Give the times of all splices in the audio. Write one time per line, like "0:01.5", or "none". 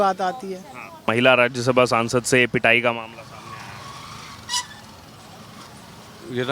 0:01.0